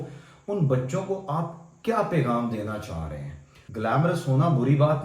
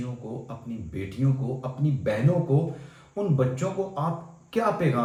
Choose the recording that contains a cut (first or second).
first